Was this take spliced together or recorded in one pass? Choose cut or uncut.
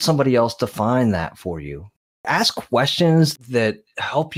cut